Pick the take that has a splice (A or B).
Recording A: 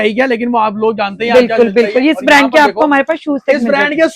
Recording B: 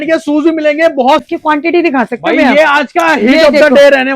B